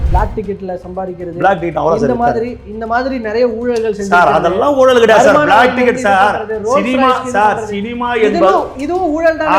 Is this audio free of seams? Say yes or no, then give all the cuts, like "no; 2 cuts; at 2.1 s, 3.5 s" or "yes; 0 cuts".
yes; 0 cuts